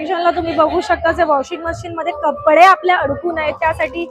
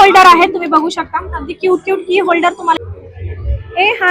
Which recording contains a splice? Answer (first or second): second